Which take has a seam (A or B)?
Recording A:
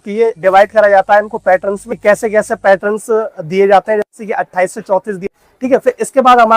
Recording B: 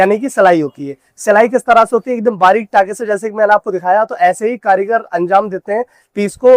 A